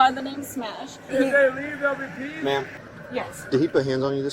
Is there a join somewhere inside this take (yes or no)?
yes